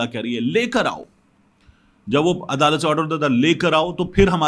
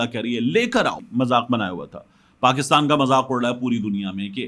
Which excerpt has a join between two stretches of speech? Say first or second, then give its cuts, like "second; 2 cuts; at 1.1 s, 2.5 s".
second; 1 cut; at 1.0 s